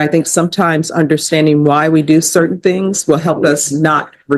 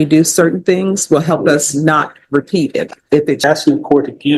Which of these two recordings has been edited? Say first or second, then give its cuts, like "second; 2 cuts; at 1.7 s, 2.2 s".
second; 1 cut; at 3.4 s